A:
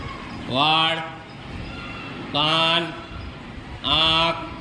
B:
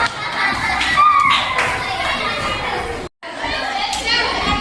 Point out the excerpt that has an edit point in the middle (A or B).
B